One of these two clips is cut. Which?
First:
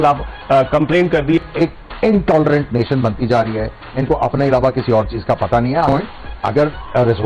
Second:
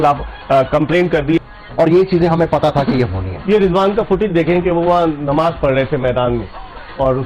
first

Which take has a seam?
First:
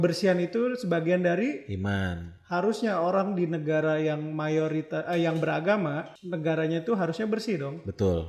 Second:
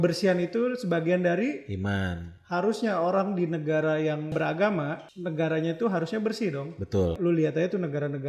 second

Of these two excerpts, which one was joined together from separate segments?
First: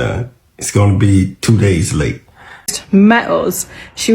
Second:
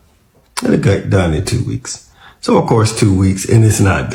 first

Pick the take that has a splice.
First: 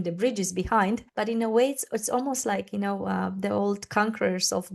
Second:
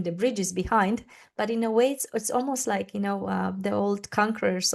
first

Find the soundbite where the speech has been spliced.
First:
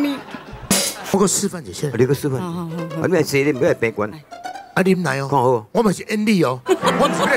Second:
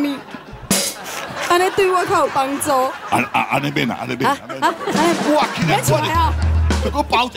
first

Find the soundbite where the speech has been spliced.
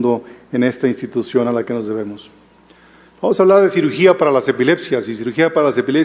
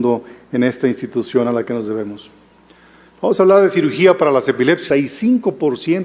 first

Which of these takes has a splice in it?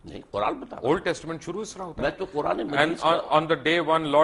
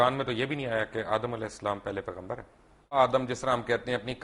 second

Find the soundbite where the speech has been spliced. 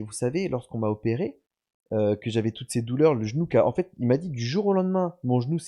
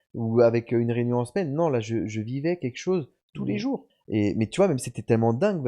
second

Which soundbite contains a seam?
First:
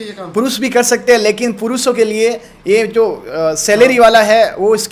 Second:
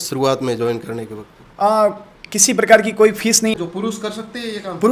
second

